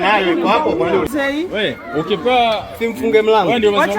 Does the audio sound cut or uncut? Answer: cut